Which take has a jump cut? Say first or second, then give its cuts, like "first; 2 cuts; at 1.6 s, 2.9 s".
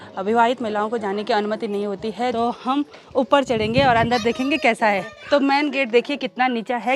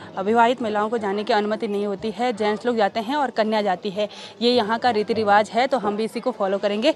first; 2 cuts; at 2.3 s, 5.2 s